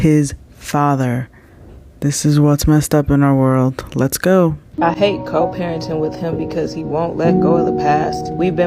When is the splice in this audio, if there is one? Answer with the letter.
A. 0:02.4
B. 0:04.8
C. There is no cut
B